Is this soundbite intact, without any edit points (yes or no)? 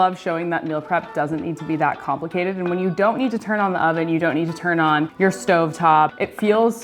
yes